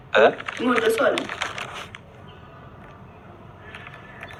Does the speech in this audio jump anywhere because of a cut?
no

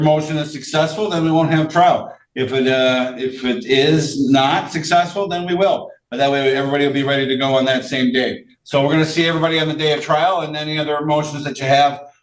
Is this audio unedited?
yes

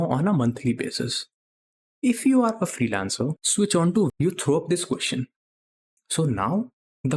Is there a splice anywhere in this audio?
yes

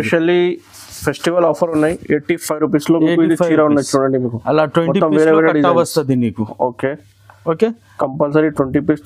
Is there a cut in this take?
no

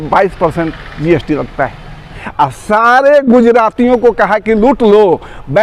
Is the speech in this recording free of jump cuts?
no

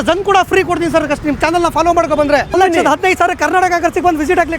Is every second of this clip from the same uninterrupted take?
no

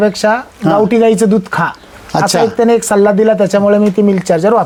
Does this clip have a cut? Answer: no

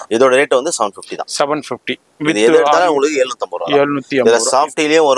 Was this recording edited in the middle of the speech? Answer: no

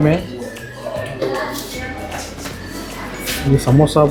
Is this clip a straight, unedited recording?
yes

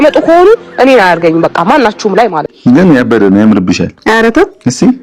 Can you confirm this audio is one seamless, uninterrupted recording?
no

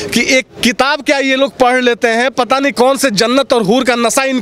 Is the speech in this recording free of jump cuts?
yes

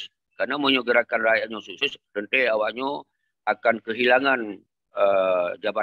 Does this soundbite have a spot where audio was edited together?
no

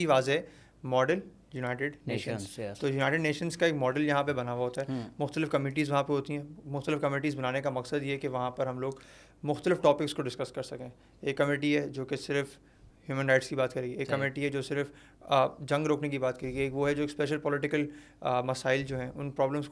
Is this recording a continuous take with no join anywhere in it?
yes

